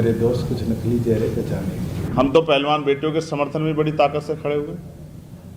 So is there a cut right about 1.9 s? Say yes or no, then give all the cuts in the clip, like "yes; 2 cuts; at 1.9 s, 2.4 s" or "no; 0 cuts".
yes; 1 cut; at 1.9 s